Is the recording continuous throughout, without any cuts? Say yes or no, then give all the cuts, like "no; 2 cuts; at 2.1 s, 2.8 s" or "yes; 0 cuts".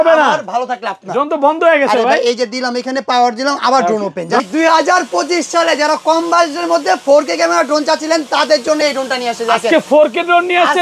no; 1 cut; at 4.4 s